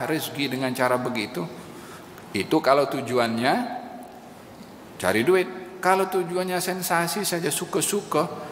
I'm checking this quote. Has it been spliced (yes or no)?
no